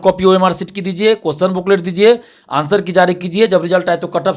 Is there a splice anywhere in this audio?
no; 0 cuts

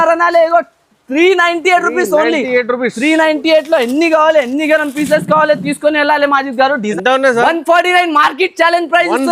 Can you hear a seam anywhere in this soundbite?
yes; 1 cut; at 6.9 s

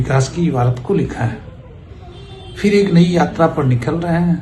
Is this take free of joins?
yes; 0 cuts

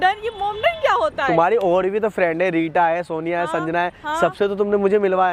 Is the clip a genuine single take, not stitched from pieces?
yes; 0 cuts

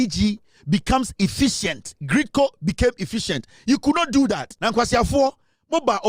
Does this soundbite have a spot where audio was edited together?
yes; 1 cut; at 4.5 s

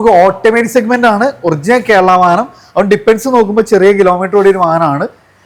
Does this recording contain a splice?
no; 0 cuts

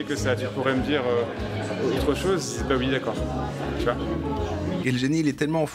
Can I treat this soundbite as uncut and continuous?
no; 1 cut; at 4.8 s

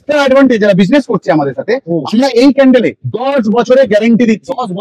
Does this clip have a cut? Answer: no; 0 cuts

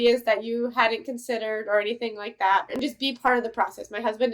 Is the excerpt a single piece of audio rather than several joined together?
no; 1 cut; at 2.7 s

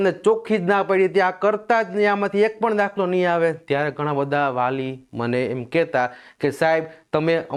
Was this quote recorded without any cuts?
yes; 0 cuts

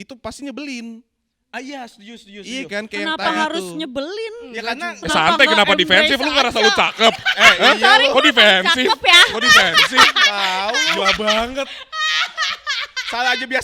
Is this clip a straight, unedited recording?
yes; 0 cuts

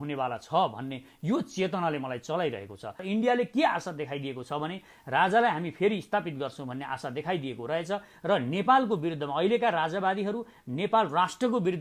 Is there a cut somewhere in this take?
yes; 1 cut; at 2.9 s

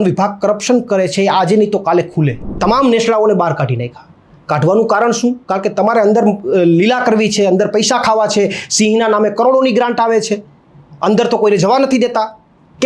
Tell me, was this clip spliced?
yes; 1 cut; at 2.5 s

